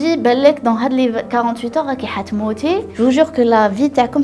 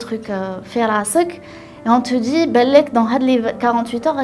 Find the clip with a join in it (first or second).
first